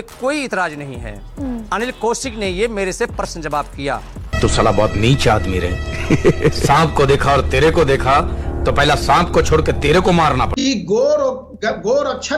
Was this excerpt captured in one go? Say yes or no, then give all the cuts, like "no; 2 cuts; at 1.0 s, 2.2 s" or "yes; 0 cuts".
yes; 0 cuts